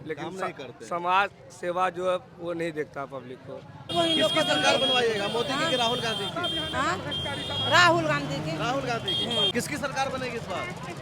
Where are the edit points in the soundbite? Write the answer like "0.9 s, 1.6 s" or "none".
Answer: 3.9 s, 9.5 s